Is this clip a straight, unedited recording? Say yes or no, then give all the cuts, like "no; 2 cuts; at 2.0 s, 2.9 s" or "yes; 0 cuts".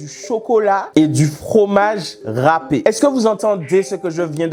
yes; 0 cuts